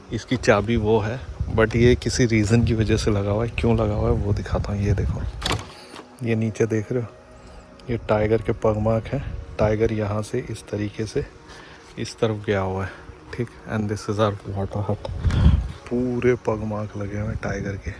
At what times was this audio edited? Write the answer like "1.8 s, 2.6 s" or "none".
none